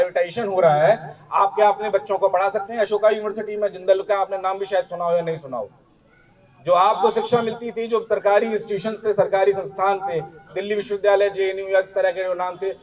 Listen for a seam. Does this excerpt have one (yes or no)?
no